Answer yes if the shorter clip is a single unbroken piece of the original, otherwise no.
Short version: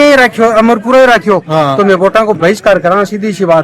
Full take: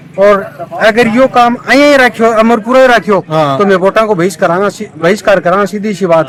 no